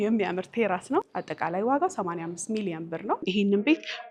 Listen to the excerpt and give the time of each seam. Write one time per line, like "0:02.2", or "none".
0:01.1
0:03.3